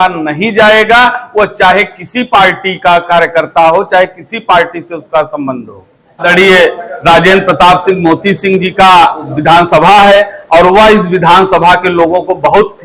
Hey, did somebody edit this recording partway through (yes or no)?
yes